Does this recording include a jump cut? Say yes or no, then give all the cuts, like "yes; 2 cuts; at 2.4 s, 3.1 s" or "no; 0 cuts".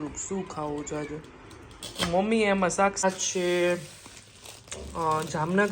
yes; 1 cut; at 3.0 s